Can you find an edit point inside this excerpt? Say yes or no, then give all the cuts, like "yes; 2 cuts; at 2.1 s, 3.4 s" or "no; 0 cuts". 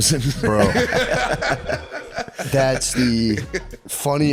no; 0 cuts